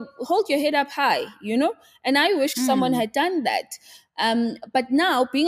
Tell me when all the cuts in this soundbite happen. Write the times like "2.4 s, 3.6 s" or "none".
none

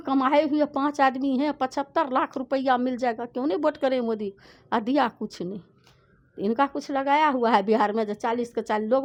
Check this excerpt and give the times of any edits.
none

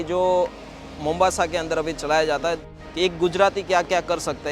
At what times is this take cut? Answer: 2.7 s

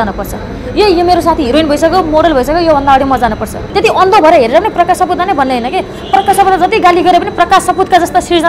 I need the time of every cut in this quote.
3.6 s

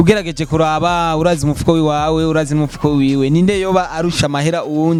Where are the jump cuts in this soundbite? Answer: none

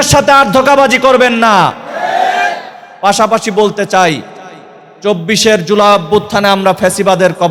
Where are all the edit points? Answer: none

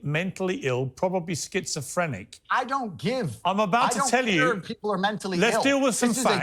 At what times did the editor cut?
none

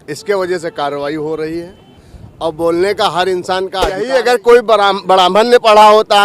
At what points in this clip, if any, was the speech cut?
4.0 s

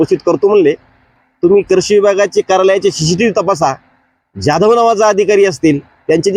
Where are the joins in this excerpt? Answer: 1.1 s

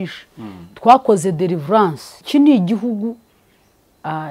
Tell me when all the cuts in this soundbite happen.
2.1 s

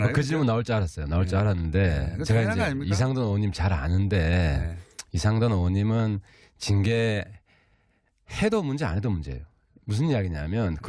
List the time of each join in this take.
4.1 s

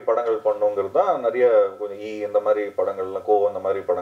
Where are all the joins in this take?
none

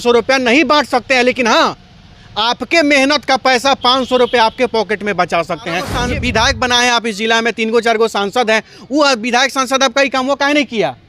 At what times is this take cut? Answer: 5.9 s

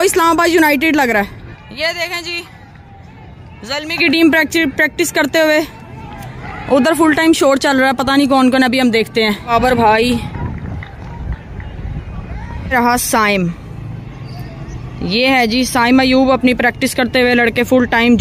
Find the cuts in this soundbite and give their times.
1.6 s, 9.5 s, 12.7 s

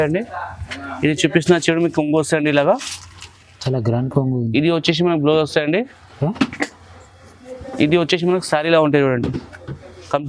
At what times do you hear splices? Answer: none

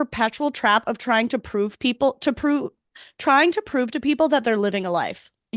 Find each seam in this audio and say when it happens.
none

